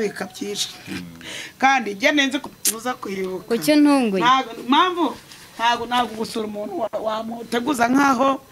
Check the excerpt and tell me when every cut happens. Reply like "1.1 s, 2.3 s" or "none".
2.4 s